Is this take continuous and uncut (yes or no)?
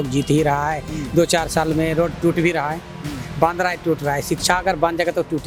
yes